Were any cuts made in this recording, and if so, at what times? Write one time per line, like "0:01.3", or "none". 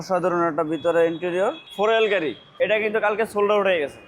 0:01.6
0:02.5